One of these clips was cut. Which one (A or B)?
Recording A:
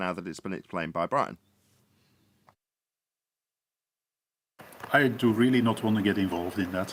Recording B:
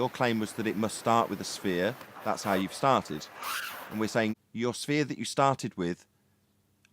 B